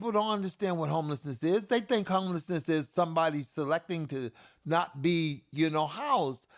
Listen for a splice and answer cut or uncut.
uncut